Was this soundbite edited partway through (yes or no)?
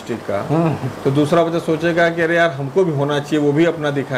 no